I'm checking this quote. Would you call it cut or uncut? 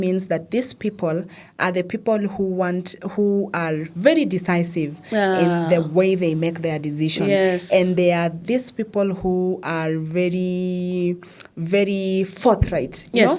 uncut